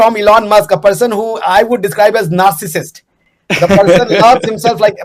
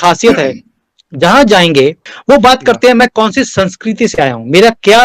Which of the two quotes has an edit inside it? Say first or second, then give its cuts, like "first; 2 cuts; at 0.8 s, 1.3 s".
second; 1 cut; at 2.1 s